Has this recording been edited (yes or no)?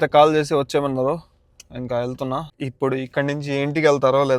no